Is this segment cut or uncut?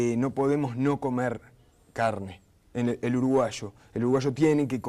cut